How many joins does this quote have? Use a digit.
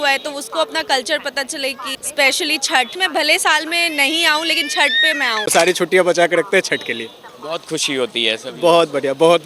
3